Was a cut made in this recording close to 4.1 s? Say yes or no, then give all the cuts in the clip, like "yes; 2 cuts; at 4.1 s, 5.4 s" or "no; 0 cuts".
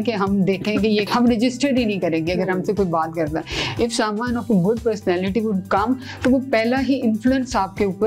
no; 1 cut; at 1.1 s